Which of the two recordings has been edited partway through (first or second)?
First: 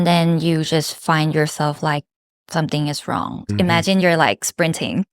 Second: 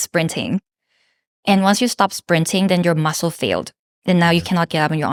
first